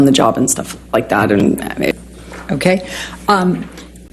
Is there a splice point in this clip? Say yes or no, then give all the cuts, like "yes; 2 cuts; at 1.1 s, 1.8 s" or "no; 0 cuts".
yes; 1 cut; at 1.9 s